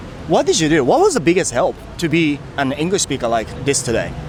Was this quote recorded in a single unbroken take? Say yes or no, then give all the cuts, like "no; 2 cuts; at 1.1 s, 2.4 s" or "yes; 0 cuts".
yes; 0 cuts